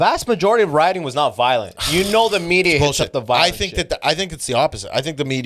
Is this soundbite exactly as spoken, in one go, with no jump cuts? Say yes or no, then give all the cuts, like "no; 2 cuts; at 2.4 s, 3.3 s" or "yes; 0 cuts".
yes; 0 cuts